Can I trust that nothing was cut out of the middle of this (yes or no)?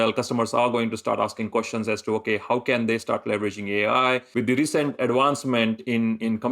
no